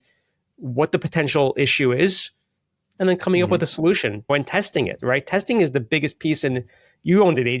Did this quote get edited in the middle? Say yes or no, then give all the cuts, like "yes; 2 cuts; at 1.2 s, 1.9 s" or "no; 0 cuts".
yes; 1 cut; at 4.3 s